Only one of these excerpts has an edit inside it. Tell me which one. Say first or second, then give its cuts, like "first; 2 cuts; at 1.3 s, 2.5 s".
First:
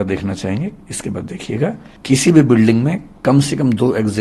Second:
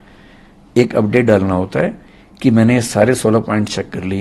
first; 1 cut; at 1.9 s